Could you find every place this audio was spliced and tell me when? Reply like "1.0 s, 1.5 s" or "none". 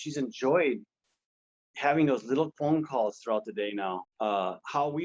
4.1 s